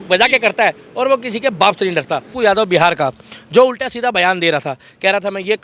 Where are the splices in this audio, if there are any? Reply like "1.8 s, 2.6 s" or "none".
2.3 s